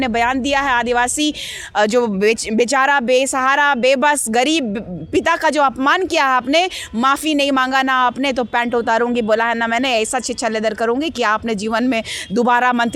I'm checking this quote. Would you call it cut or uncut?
uncut